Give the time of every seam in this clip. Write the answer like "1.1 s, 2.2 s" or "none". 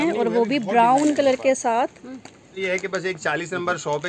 2.5 s